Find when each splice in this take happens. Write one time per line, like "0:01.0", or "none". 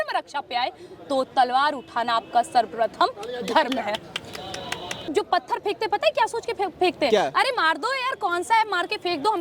0:05.1